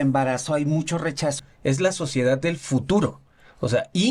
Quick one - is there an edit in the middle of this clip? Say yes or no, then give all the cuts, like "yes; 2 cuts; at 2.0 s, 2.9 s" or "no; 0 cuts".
yes; 1 cut; at 1.4 s